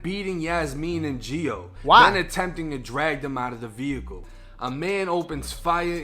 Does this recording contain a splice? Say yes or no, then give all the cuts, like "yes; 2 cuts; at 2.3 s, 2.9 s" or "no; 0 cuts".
yes; 1 cut; at 4.2 s